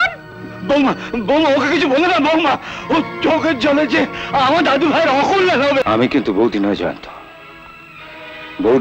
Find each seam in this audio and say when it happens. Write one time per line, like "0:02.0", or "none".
0:05.8